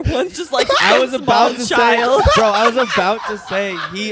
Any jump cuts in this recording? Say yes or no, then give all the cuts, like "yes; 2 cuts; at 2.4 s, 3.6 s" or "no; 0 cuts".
no; 0 cuts